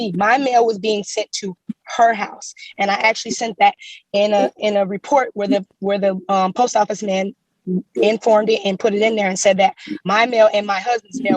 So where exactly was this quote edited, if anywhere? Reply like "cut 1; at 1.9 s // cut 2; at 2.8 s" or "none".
cut 1; at 9.9 s